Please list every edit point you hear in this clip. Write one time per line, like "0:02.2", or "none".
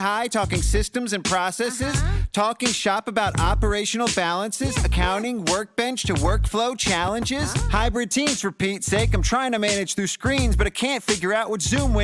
none

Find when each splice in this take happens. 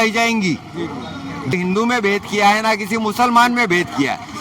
0:01.5

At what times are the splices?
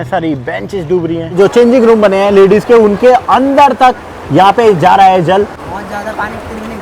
0:01.3
0:05.6

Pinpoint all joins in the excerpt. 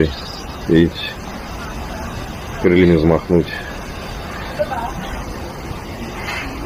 none

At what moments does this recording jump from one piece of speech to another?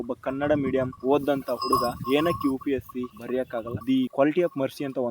0:03.7

